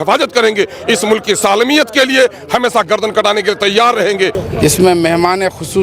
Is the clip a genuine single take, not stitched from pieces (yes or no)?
no